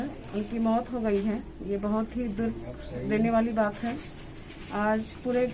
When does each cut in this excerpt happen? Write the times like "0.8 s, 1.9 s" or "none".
none